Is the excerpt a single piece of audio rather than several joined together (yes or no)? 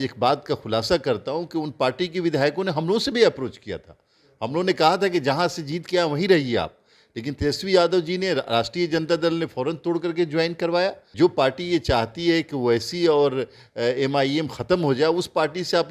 no